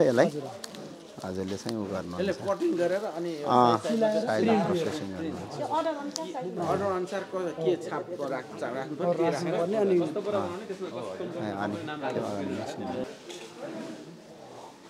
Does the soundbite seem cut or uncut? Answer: uncut